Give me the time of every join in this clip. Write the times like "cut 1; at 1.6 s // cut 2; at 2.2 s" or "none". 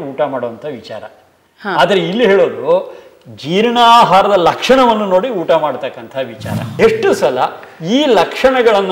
cut 1; at 6.7 s